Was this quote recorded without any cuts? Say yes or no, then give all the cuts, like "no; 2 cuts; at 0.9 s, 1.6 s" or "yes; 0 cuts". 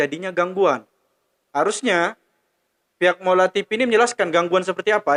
yes; 0 cuts